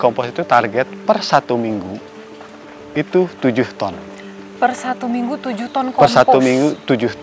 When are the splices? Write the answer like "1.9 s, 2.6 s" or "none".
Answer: none